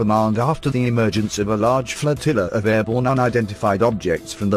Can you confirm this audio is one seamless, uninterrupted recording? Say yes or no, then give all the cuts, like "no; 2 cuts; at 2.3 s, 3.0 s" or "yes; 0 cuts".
no; 1 cut; at 1.8 s